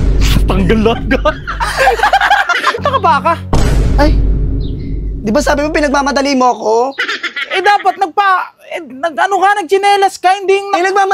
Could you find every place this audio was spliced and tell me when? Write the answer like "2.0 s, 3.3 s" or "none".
2.8 s